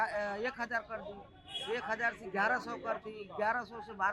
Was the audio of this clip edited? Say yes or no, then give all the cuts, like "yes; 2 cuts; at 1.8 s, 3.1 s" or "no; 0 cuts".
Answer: no; 0 cuts